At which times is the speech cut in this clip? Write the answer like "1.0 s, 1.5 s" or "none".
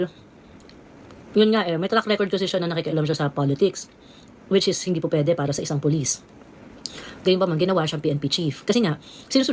none